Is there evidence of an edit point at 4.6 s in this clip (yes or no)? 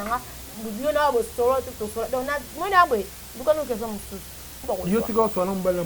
yes